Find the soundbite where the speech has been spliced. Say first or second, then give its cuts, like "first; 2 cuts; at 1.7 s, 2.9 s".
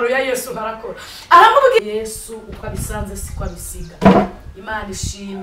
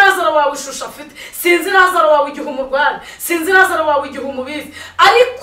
first; 1 cut; at 1.8 s